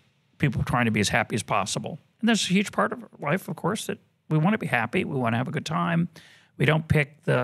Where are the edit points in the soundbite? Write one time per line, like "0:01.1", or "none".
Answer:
none